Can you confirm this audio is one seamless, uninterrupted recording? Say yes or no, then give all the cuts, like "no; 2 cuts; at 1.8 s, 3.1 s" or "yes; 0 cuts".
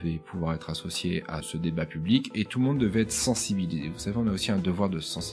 no; 1 cut; at 1.5 s